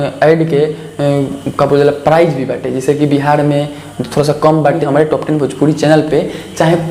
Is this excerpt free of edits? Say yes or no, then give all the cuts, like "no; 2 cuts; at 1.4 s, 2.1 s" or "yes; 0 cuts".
no; 1 cut; at 4.8 s